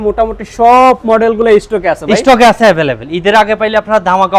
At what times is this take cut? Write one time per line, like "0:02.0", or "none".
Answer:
none